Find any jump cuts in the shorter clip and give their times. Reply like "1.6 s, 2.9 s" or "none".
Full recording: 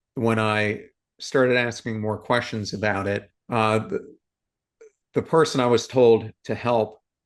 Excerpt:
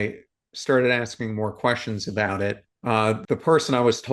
3.2 s